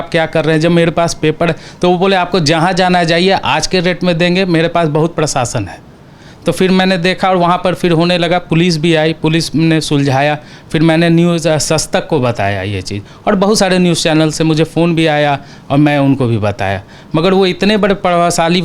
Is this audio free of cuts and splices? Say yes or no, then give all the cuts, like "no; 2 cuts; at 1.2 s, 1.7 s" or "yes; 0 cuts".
yes; 0 cuts